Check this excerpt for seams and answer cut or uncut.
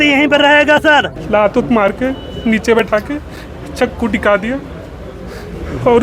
cut